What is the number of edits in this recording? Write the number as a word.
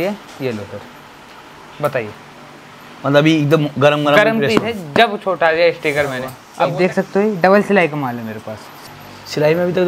two